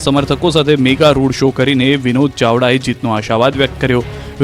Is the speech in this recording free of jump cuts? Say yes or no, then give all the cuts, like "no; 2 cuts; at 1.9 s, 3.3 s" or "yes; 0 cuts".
yes; 0 cuts